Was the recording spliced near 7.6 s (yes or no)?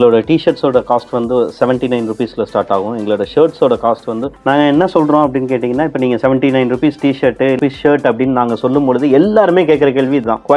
yes